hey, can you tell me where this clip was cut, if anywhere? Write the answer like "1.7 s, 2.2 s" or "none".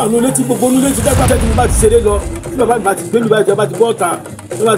1.2 s